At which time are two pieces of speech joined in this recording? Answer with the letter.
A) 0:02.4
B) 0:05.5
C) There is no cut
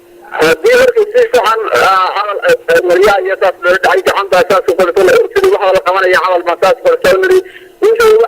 B